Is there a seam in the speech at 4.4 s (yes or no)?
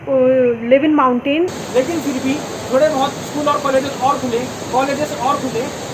no